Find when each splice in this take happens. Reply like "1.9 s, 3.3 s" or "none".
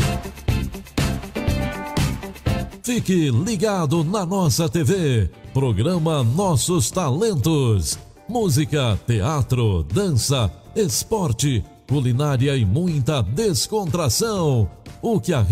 none